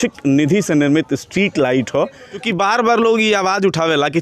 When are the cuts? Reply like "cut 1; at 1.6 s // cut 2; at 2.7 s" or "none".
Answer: cut 1; at 2.3 s